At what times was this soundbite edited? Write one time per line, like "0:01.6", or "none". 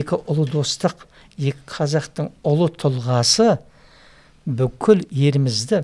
none